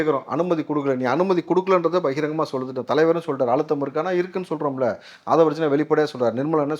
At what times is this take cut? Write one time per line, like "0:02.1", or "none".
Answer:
none